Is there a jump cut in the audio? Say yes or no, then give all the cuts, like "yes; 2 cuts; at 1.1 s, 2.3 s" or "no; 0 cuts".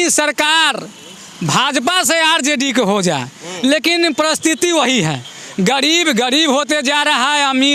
no; 0 cuts